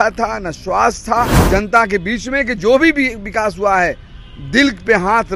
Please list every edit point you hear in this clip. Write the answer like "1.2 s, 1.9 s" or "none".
1.4 s